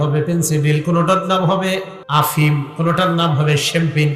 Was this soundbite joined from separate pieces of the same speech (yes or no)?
yes